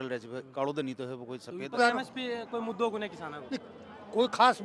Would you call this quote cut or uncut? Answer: cut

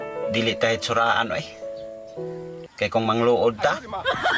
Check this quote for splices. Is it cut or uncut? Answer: uncut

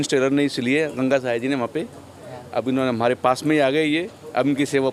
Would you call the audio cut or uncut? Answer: uncut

